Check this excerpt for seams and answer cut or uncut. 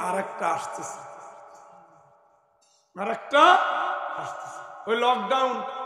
uncut